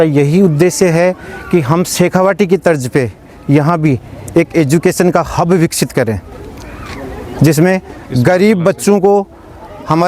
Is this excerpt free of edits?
yes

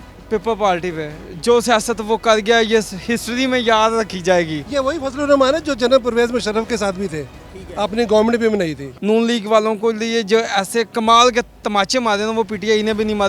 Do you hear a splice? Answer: yes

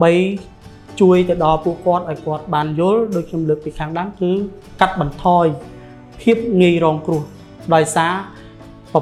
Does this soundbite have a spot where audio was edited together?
no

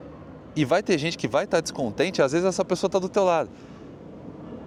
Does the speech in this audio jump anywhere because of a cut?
no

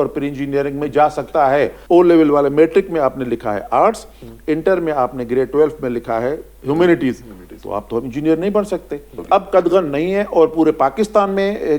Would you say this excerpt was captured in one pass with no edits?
no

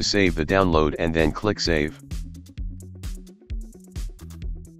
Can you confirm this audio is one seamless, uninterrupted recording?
yes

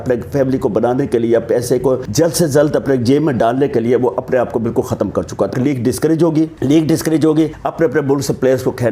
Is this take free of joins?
no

